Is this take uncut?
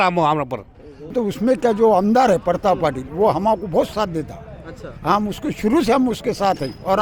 no; 1 cut; at 1.1 s

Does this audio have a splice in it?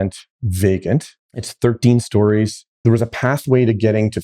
yes; 2 cuts; at 1.1 s, 2.6 s

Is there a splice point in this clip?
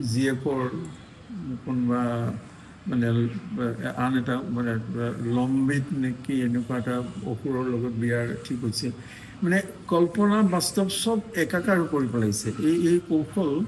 no; 0 cuts

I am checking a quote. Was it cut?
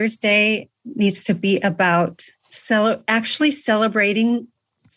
no; 0 cuts

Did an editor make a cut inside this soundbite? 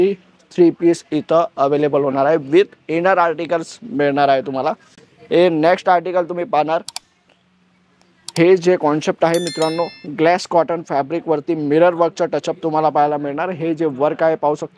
no; 0 cuts

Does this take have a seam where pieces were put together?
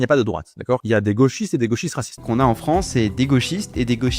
yes; 2 cuts; at 0.8 s, 2.2 s

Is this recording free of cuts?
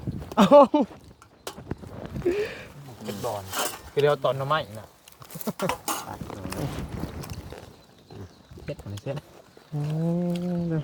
yes; 0 cuts

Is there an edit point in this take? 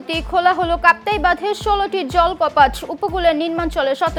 no; 0 cuts

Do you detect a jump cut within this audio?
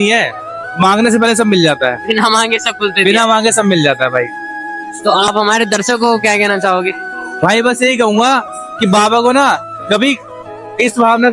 no; 0 cuts

